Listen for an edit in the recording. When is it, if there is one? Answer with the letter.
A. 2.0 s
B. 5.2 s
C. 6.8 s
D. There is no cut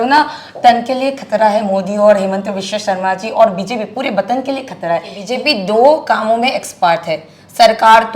B